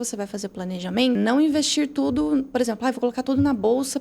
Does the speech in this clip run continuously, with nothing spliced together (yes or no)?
no